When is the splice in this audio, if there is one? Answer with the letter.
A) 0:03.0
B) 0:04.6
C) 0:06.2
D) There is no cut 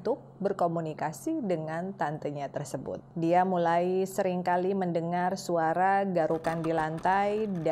A